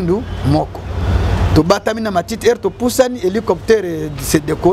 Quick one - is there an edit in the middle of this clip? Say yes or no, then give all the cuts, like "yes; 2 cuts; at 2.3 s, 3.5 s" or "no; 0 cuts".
no; 0 cuts